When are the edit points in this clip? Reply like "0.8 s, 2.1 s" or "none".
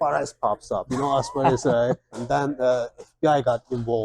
2.1 s